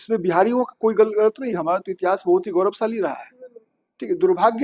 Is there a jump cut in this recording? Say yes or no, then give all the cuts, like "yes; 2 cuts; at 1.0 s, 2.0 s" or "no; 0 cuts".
no; 0 cuts